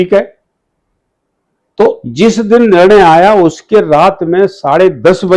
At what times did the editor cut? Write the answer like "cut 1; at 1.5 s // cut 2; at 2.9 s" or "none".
none